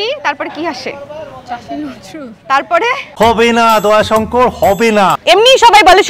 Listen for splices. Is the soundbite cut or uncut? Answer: cut